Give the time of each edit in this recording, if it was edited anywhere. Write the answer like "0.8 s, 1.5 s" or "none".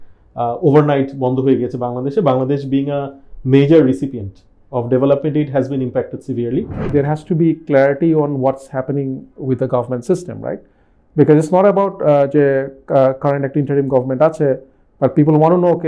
6.9 s